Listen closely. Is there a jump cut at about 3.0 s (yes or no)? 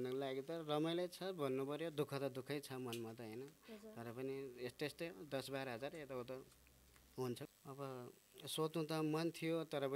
no